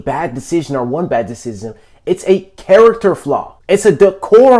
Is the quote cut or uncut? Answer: cut